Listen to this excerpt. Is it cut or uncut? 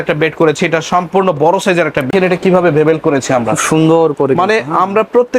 cut